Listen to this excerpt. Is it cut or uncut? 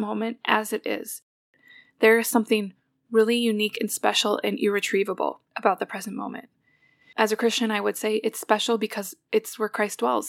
cut